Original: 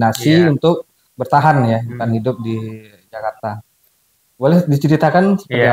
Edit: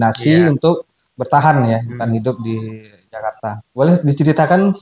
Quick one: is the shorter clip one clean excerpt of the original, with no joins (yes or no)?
no